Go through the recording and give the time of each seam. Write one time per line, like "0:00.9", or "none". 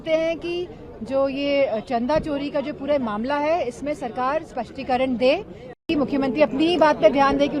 0:05.8